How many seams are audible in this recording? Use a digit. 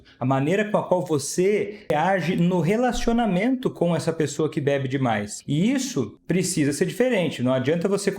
3